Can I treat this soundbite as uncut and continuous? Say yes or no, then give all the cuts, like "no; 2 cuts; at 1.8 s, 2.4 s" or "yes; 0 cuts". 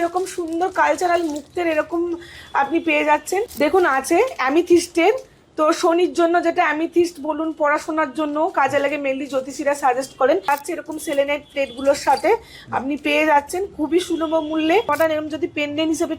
no; 3 cuts; at 3.5 s, 10.5 s, 14.9 s